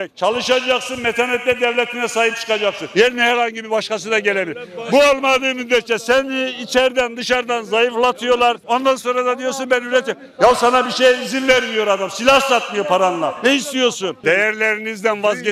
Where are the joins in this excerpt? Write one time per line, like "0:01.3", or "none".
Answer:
0:14.2